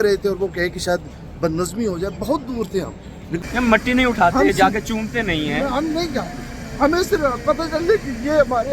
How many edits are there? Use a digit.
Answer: 1